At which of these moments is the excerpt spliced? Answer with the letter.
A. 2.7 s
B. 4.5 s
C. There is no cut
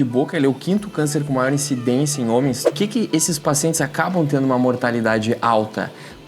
A